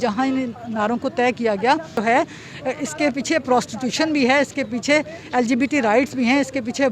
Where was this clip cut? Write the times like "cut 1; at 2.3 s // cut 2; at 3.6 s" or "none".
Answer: cut 1; at 2.0 s

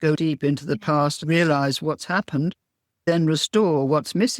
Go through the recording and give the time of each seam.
cut 1; at 1.2 s // cut 2; at 3.1 s

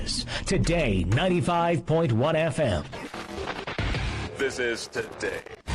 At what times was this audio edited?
cut 1; at 2.9 s

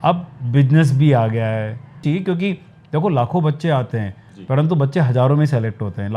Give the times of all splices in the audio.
cut 1; at 2.0 s

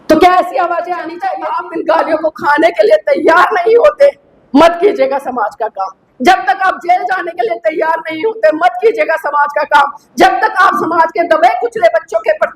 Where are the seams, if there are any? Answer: cut 1; at 1.3 s

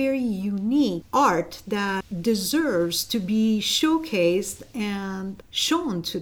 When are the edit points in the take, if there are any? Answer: cut 1; at 1.0 s // cut 2; at 2.1 s

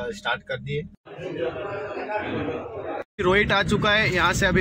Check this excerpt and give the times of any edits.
cut 1; at 1.0 s // cut 2; at 3.0 s

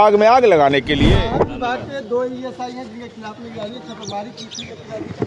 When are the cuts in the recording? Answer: cut 1; at 1.1 s

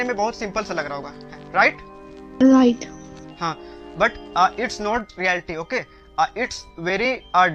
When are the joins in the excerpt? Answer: none

